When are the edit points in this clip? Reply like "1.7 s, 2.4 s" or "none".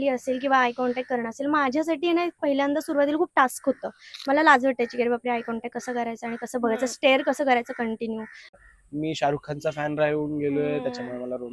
8.7 s